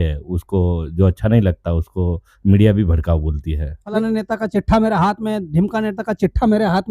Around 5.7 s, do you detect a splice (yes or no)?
no